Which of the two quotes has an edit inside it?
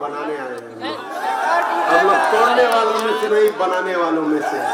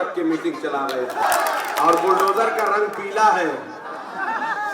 second; 1 cut; at 1.2 s

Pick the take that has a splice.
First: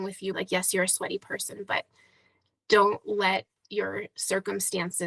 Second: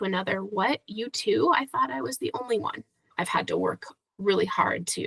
second; 1 cut; at 3.1 s

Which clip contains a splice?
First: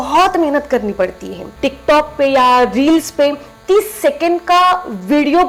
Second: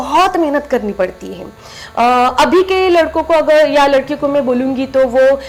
first; 1 cut; at 1.5 s

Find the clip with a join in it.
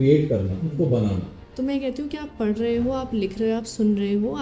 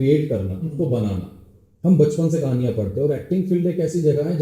first; 1 cut; at 1.5 s

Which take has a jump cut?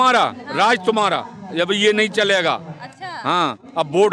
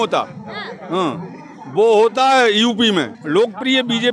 second; 1 cut; at 3.2 s

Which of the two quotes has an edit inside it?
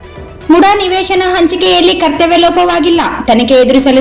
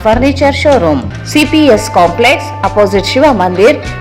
second; 1 cut; at 1.0 s

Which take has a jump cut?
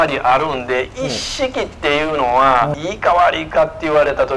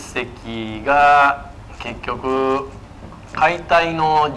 first; 1 cut; at 2.7 s

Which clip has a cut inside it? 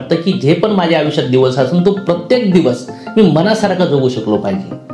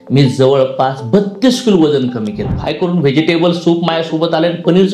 second; 1 cut; at 2.5 s

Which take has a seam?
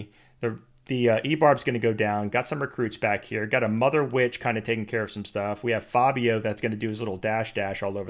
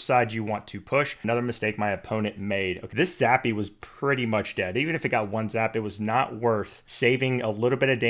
second; 3 cuts; at 1.2 s, 2.8 s, 6.8 s

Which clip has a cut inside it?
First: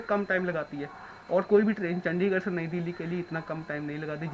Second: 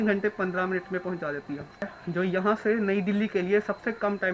second; 1 cut; at 1.9 s

